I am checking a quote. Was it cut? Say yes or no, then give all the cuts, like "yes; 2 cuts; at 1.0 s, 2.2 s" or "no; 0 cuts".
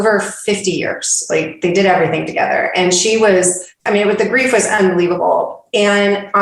yes; 1 cut; at 3.8 s